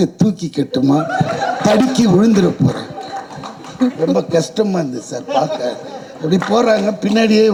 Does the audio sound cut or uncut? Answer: uncut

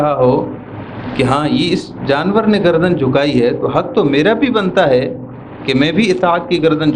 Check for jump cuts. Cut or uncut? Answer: uncut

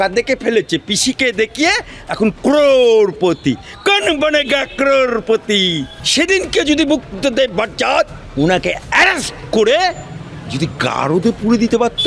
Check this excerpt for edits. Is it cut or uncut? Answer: cut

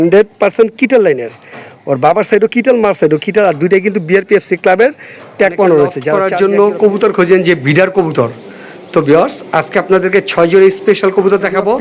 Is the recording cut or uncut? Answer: cut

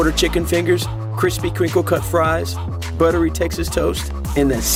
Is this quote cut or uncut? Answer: uncut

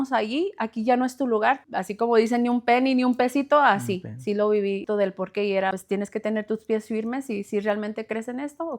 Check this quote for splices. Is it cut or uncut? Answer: cut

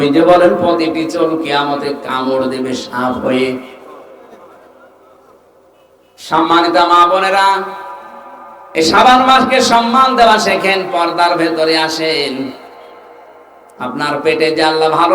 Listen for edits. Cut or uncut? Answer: uncut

